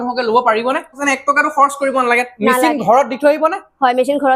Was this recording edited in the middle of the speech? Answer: yes; 1 cut; at 1.0 s

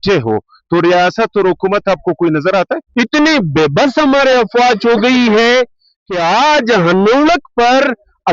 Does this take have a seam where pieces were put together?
yes; 1 cut; at 2.8 s

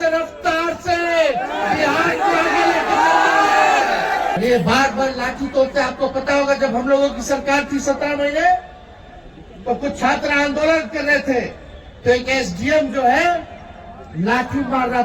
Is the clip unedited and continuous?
no; 1 cut; at 4.4 s

